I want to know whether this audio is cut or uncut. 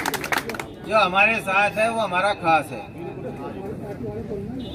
uncut